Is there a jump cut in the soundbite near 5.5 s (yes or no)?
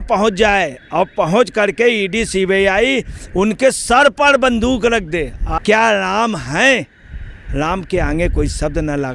yes